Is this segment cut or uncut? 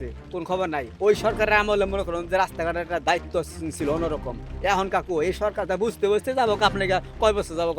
uncut